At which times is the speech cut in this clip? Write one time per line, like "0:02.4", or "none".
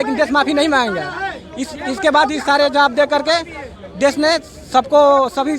none